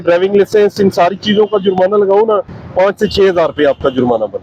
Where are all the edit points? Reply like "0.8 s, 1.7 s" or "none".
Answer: none

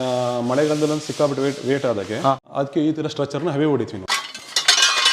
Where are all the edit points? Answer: 2.4 s, 4.0 s

